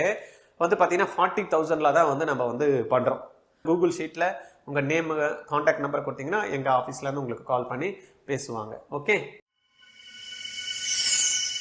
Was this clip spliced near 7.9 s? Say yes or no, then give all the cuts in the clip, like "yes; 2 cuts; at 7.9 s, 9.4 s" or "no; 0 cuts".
no; 2 cuts; at 3.6 s, 9.4 s